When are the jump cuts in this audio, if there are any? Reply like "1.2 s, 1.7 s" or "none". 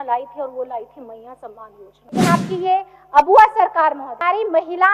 2.2 s, 4.2 s